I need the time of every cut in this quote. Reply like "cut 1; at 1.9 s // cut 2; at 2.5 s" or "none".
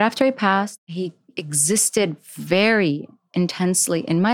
cut 1; at 0.9 s